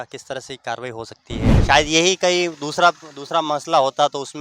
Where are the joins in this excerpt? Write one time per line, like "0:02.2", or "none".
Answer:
0:01.5